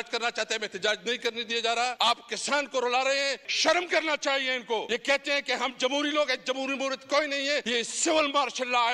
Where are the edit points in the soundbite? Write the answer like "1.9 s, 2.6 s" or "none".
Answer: 1.9 s, 3.5 s, 4.9 s, 7.7 s